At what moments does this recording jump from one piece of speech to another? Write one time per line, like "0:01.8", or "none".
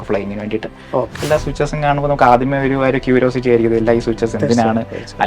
0:01.2